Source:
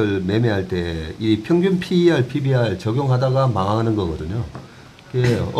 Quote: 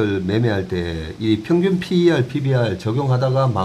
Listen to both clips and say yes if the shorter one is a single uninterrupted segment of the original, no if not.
yes